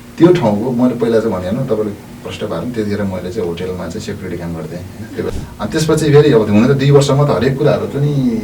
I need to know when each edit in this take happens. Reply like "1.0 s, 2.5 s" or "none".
5.2 s

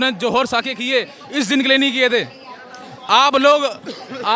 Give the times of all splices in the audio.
none

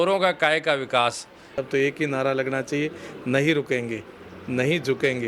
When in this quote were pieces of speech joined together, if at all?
1.6 s

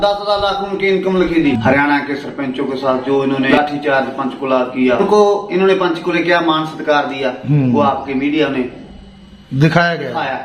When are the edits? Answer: 1.6 s, 3.5 s, 5.0 s

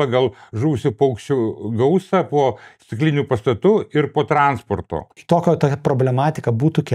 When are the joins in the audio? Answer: 5.2 s

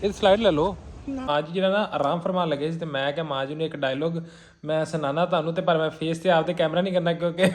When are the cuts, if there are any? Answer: 1.3 s

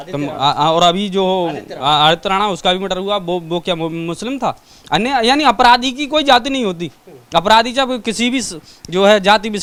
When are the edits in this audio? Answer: none

